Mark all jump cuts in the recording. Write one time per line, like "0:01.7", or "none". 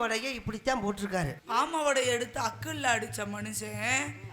0:01.4